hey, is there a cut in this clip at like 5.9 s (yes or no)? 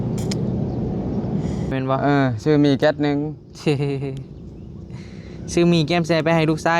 no